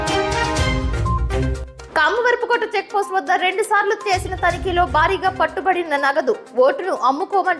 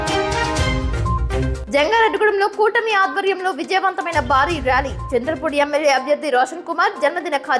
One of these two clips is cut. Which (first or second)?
first